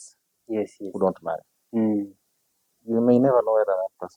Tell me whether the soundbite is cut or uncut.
uncut